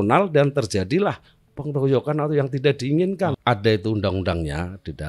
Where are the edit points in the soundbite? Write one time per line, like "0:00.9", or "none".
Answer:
0:03.4